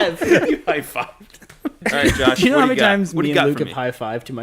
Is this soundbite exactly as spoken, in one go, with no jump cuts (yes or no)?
no